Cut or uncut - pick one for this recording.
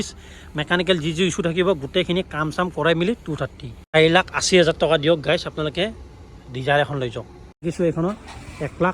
cut